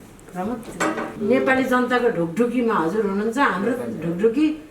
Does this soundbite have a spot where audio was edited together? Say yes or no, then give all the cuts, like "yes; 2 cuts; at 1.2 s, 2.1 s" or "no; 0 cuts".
yes; 1 cut; at 1.1 s